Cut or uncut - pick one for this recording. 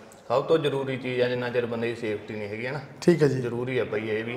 uncut